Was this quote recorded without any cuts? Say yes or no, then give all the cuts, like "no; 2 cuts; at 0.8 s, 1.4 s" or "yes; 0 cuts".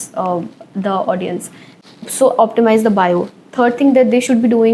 no; 1 cut; at 1.8 s